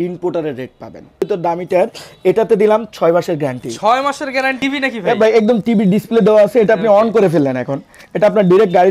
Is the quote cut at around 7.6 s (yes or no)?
no